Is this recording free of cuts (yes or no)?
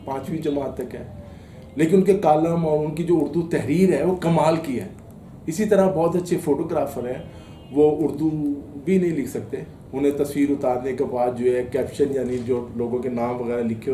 yes